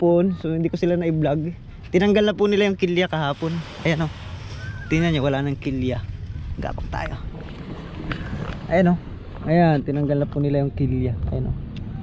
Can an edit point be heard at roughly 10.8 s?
no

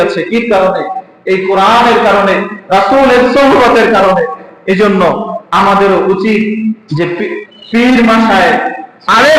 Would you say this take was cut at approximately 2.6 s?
no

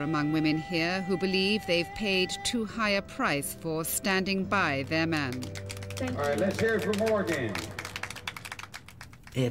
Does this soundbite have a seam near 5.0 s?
no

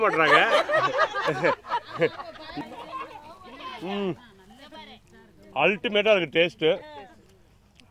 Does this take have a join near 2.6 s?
yes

